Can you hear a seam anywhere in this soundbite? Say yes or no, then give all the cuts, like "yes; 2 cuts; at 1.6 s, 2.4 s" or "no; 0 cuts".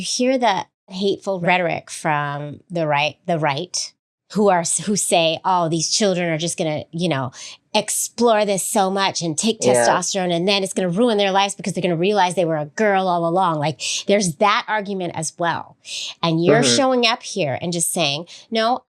yes; 1 cut; at 1.2 s